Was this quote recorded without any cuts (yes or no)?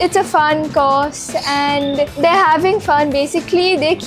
yes